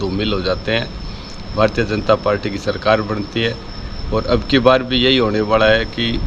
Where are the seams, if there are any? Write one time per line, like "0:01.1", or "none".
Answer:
none